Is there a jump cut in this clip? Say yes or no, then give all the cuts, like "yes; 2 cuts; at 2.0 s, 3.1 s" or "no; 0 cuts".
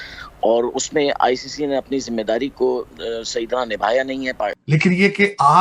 yes; 1 cut; at 4.6 s